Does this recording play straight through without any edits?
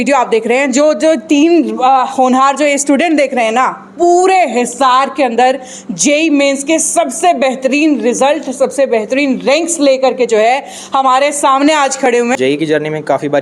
no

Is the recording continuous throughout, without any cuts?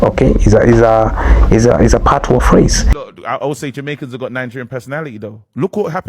no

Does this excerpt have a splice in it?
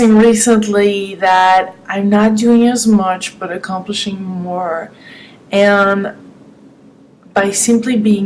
yes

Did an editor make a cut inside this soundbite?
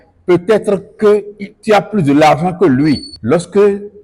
yes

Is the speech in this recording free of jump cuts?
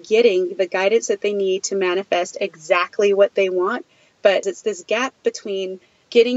no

